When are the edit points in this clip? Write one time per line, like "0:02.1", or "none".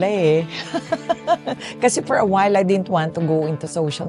none

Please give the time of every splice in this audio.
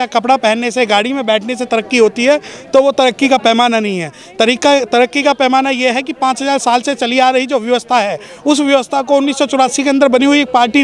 none

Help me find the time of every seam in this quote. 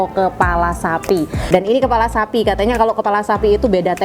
0:01.5

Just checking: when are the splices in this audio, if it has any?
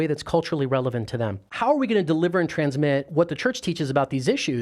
0:01.4

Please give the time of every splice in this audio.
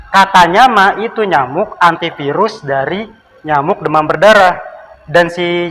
none

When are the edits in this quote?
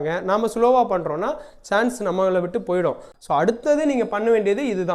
0:03.1

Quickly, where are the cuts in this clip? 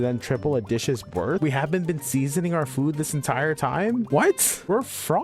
0:01.4
0:04.2

